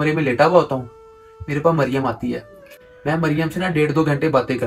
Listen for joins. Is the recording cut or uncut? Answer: uncut